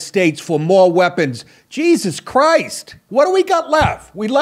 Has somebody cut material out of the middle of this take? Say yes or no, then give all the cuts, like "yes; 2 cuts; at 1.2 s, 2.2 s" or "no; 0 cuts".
yes; 1 cut; at 3.0 s